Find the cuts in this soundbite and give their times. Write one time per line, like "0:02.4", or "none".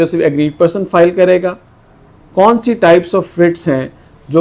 none